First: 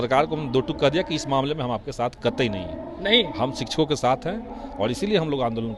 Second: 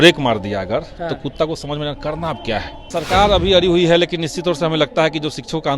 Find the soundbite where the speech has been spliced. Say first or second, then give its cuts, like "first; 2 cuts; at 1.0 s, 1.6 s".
second; 1 cut; at 2.8 s